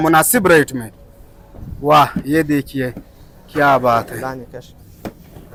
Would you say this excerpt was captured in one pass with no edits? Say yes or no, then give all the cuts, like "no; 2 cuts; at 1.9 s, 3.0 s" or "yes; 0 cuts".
yes; 0 cuts